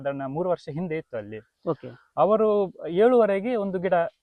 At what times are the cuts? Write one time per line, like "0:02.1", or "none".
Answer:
none